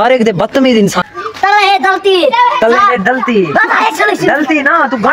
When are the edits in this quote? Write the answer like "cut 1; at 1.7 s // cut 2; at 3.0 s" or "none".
cut 1; at 1.0 s